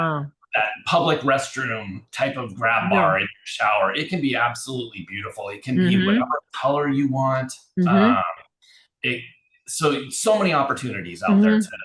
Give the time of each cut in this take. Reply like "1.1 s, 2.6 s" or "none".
none